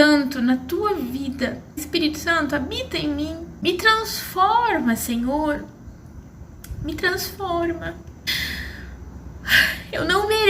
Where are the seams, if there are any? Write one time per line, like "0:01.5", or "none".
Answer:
0:01.8
0:03.5
0:08.3